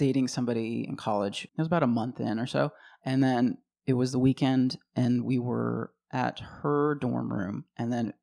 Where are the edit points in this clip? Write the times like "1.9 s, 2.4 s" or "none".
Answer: none